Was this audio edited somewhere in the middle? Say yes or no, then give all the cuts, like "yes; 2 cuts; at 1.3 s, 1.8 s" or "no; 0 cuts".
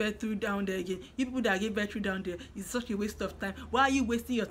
no; 0 cuts